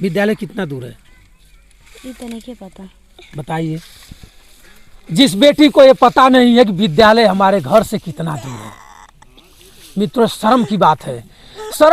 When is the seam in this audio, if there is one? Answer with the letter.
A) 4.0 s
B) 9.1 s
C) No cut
C